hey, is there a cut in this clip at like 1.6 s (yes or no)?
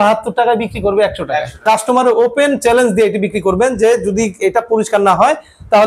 yes